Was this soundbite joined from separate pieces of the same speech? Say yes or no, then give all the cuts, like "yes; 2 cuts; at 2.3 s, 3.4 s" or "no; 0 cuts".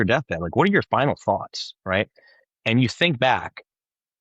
no; 0 cuts